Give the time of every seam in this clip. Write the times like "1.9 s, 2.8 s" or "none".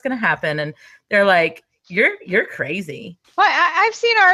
3.2 s